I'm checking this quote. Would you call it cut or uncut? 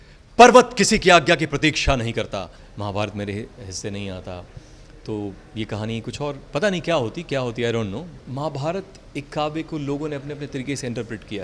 cut